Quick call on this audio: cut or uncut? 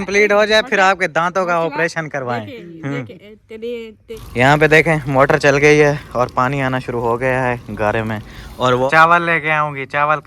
cut